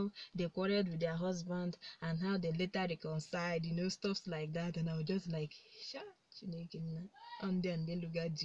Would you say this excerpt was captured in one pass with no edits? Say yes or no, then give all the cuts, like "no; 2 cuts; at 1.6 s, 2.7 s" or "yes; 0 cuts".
yes; 0 cuts